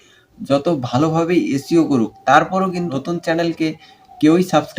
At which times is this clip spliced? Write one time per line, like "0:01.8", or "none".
0:02.9